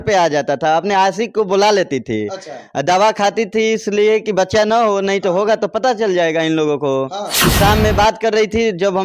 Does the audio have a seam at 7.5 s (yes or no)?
yes